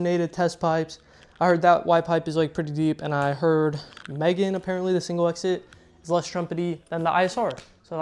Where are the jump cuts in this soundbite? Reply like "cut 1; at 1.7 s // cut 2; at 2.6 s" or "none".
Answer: none